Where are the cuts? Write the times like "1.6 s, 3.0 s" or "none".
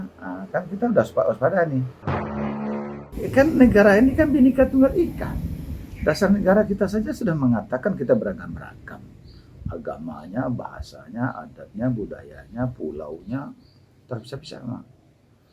2.5 s